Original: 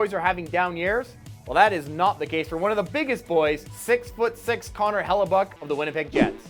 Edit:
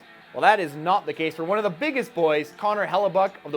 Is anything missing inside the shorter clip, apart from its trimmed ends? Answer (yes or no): yes